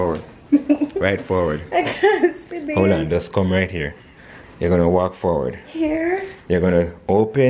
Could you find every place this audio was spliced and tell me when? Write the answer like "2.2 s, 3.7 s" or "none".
none